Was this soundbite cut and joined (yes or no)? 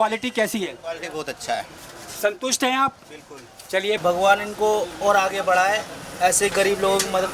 yes